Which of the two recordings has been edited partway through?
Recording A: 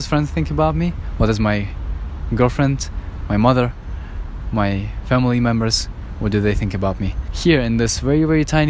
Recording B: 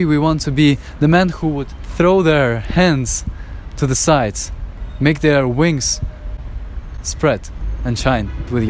A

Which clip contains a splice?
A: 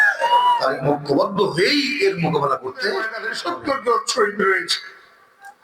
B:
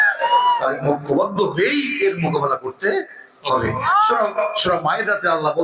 A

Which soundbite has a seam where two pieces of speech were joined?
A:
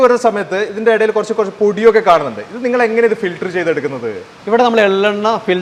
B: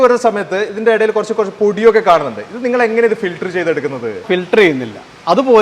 B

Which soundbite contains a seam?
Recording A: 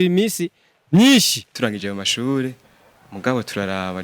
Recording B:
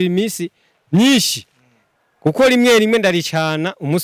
A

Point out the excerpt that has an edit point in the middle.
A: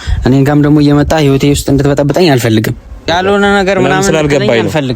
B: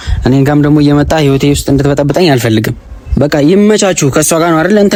A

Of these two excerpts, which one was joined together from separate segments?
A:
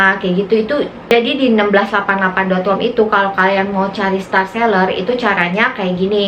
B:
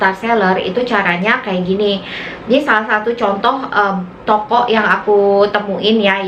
A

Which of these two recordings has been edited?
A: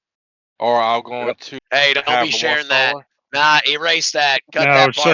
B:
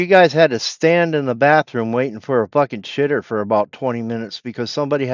A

